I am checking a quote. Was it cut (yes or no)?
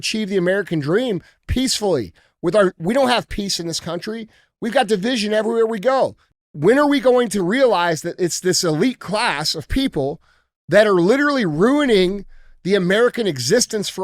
yes